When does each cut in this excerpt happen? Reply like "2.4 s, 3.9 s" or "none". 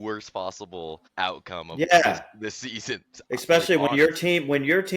1.0 s